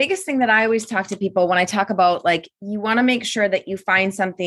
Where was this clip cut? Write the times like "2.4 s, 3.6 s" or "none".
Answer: none